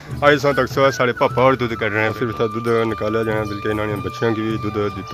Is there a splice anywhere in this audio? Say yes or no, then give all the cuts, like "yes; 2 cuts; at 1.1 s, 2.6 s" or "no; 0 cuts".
yes; 1 cut; at 2.1 s